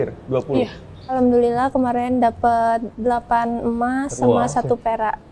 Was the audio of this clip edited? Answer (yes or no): yes